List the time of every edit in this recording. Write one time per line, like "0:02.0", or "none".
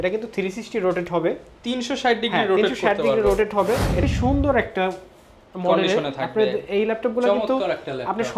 0:04.0